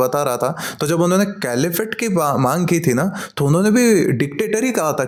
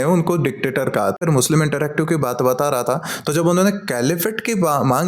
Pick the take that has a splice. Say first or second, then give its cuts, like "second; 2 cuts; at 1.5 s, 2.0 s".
second; 1 cut; at 1.2 s